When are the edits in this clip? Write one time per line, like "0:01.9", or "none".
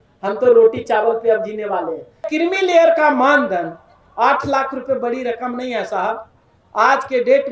0:02.3

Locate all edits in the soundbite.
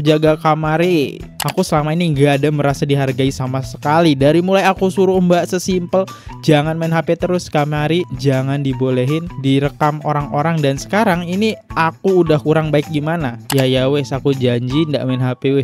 0:01.3
0:13.4

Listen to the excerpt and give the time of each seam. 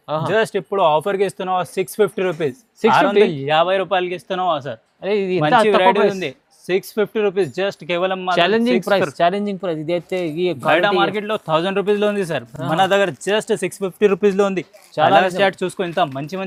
none

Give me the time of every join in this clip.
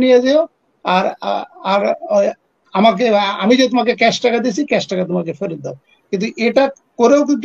none

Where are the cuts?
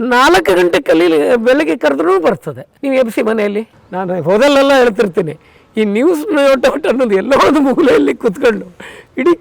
0:03.7

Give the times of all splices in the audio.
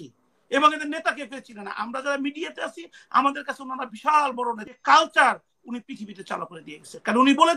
0:04.6

